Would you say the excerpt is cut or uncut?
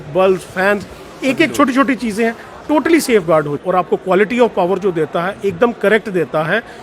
cut